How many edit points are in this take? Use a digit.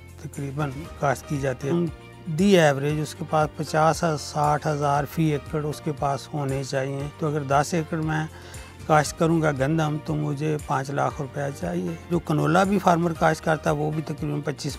3